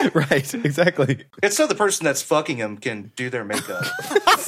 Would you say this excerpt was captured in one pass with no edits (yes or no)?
no